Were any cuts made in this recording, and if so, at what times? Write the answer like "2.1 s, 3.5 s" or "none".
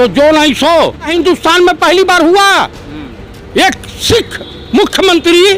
1.1 s